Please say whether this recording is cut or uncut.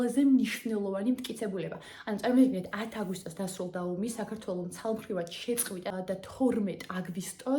cut